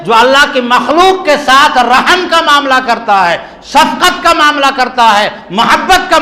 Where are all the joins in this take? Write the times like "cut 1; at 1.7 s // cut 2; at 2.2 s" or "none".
none